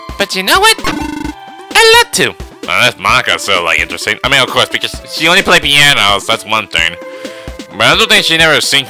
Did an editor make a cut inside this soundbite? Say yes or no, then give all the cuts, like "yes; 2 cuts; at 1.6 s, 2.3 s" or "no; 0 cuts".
no; 0 cuts